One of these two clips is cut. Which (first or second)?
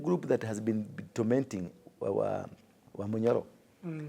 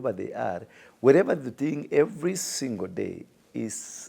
first